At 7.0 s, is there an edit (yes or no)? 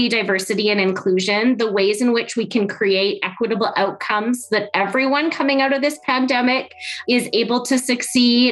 yes